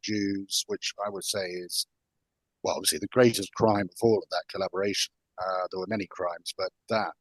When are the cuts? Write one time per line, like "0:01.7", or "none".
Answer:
none